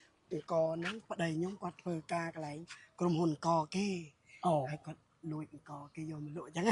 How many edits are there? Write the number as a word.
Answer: zero